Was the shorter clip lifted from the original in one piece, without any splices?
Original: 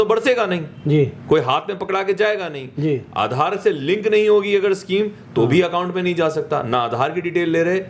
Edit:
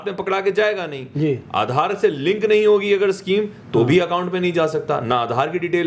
yes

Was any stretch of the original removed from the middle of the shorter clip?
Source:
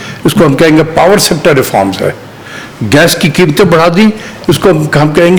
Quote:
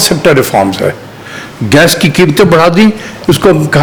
no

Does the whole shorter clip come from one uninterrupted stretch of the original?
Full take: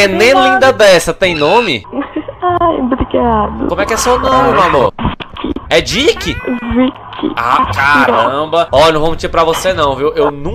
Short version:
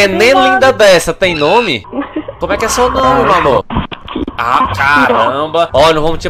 no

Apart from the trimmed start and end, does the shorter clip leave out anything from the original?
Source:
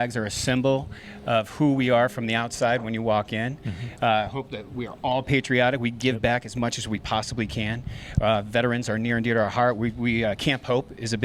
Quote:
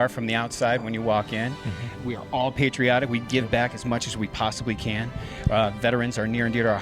yes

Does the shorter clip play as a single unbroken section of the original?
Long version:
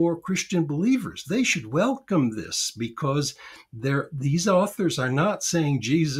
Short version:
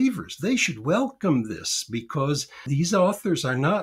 no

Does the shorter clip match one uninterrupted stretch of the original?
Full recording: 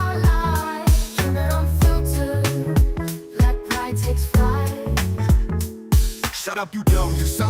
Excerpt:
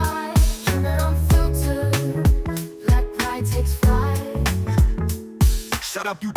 yes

